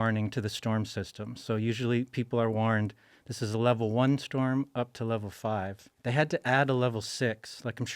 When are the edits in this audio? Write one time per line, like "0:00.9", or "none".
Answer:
0:05.8